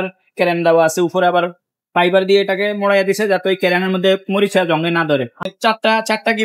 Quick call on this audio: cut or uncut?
cut